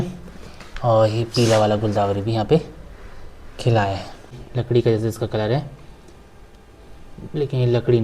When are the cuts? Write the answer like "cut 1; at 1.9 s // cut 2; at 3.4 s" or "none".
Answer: cut 1; at 4.5 s

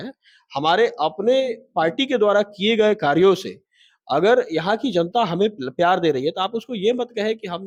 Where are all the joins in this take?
none

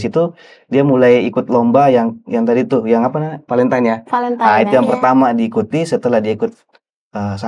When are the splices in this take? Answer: none

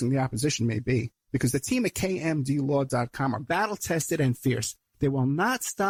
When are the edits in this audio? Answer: none

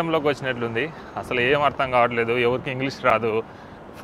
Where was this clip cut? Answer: none

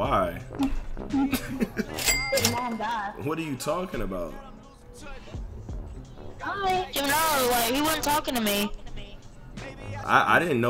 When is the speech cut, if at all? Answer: none

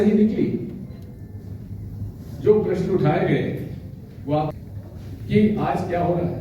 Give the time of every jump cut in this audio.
cut 1; at 4.5 s

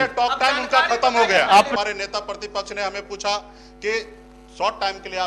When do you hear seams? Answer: cut 1; at 1.7 s

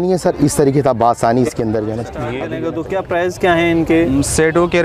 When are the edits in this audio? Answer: cut 1; at 2.4 s

